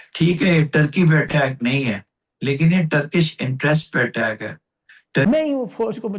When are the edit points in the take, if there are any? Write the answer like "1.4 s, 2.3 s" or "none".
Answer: 5.2 s